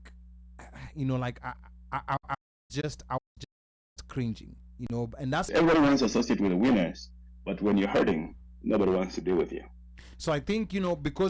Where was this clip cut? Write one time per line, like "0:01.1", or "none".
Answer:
0:05.5

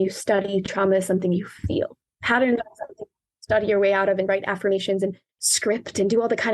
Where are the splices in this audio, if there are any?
0:02.0
0:05.3

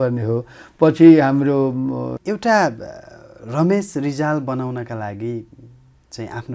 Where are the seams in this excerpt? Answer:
0:02.2

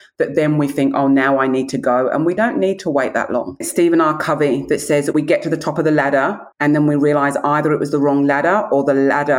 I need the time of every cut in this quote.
0:02.4
0:03.7
0:06.4

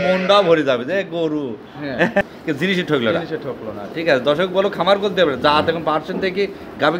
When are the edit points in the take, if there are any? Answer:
0:02.3

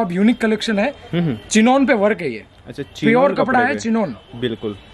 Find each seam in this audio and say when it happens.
none

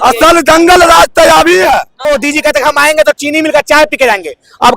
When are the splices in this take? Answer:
0:01.9

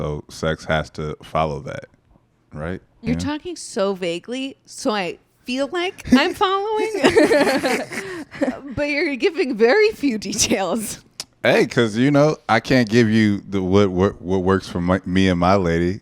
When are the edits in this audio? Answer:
0:03.0

